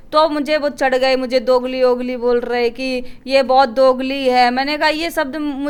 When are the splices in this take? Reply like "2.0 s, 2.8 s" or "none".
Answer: none